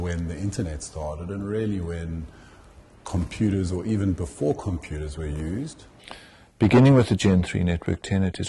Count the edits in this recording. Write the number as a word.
one